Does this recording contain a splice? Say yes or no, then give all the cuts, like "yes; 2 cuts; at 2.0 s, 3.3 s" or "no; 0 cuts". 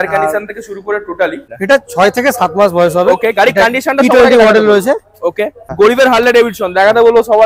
yes; 2 cuts; at 1.5 s, 5.7 s